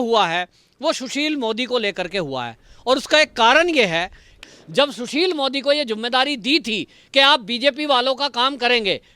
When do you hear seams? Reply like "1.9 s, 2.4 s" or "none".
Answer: 4.3 s

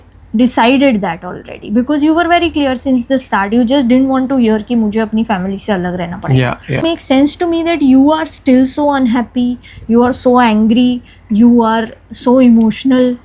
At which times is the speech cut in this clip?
6.8 s

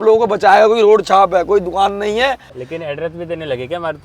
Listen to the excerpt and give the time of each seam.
2.6 s

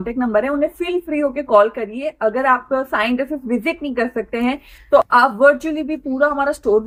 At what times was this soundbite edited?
none

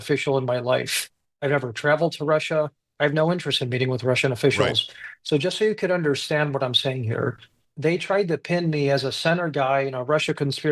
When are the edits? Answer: none

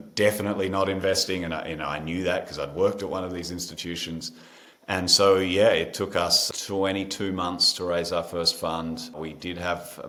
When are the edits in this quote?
none

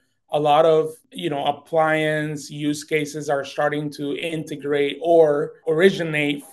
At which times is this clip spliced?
1.1 s, 5.5 s

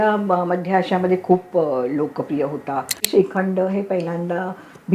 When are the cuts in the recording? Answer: 3.0 s

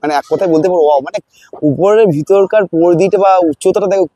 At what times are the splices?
none

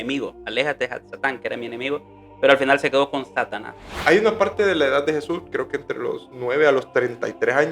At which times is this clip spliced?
4.0 s

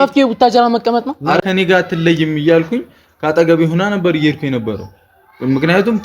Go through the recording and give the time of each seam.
1.4 s

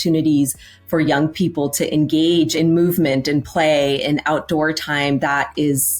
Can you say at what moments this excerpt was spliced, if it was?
2.5 s

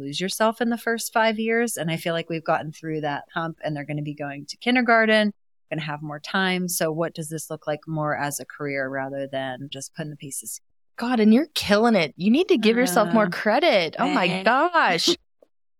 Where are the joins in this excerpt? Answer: 9.8 s

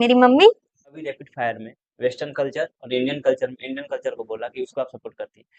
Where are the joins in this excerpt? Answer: 1.2 s

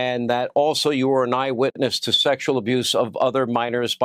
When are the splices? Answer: 1.7 s

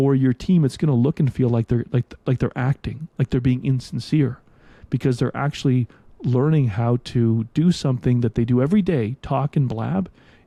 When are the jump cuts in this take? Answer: none

